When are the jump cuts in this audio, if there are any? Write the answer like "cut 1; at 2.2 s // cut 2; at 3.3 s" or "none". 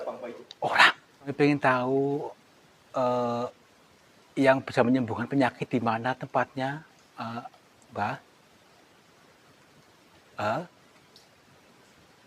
cut 1; at 1.3 s